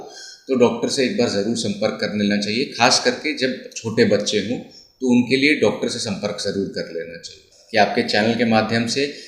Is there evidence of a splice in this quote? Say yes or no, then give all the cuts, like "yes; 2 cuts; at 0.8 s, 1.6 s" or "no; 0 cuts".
yes; 1 cut; at 7.5 s